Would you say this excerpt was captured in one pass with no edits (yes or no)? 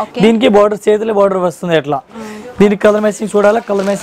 yes